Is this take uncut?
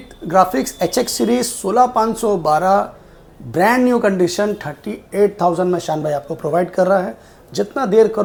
yes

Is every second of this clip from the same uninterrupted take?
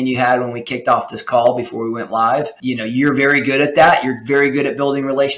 no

